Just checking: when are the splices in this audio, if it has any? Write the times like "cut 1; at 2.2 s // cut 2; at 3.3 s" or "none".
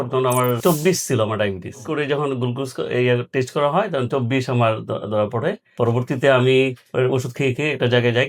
none